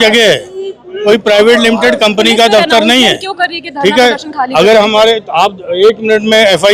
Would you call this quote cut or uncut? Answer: uncut